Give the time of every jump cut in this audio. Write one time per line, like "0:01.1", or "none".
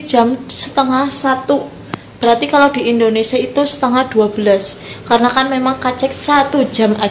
none